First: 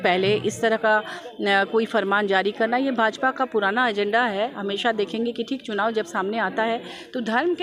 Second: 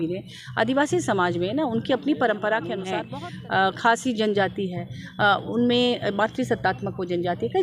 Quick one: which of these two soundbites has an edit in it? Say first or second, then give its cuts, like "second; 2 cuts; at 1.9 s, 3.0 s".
second; 1 cut; at 2.9 s